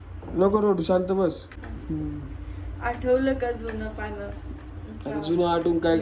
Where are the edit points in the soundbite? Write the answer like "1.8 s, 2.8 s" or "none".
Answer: 1.6 s